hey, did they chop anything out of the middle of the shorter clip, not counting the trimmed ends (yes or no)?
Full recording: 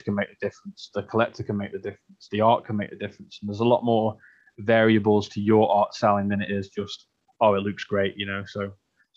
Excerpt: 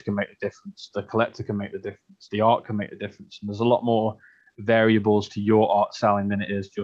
no